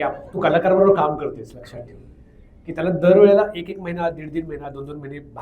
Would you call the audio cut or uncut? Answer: uncut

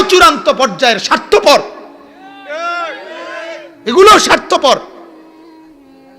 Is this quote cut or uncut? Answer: cut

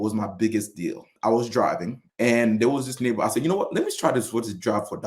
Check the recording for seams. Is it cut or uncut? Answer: cut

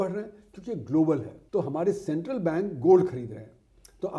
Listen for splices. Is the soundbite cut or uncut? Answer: cut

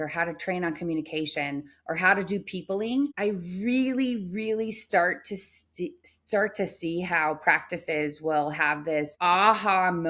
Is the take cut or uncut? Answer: cut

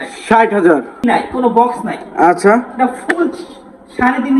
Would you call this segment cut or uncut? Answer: cut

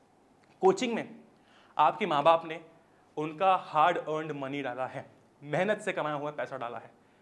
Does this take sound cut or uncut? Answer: uncut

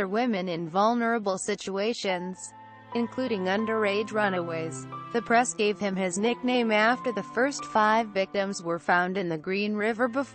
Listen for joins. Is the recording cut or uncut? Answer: cut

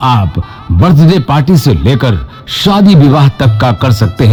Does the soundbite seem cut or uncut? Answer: uncut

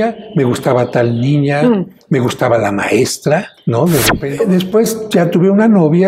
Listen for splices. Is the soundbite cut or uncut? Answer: cut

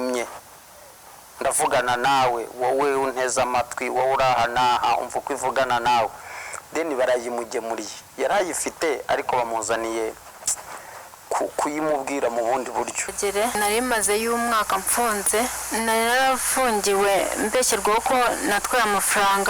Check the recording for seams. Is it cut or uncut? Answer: cut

